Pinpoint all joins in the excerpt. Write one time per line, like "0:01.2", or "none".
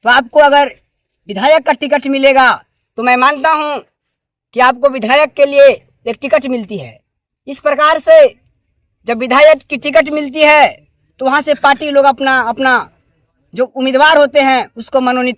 none

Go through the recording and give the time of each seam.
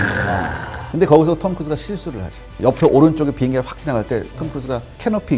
none

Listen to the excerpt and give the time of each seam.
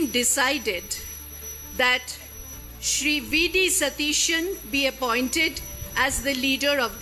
none

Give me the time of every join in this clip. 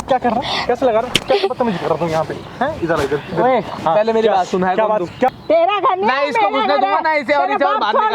0:05.3

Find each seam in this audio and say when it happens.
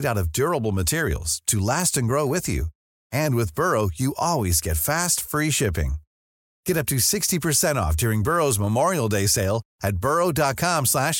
none

